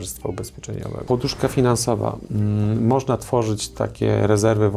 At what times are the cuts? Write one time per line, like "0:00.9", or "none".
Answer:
0:01.0